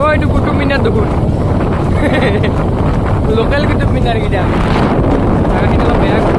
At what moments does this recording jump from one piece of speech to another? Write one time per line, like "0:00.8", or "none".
none